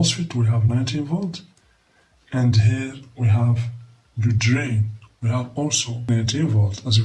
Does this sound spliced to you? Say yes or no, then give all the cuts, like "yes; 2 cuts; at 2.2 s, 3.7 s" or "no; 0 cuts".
yes; 1 cut; at 6.1 s